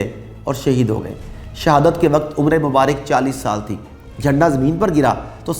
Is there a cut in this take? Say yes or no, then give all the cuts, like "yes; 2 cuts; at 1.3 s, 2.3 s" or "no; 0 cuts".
no; 0 cuts